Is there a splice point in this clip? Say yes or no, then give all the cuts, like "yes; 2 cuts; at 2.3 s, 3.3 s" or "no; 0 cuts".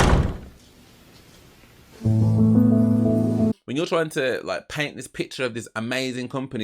yes; 1 cut; at 3.5 s